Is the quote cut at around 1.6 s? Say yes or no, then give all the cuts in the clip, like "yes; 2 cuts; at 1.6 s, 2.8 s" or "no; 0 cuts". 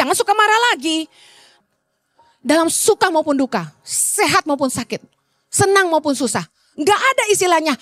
yes; 1 cut; at 1.6 s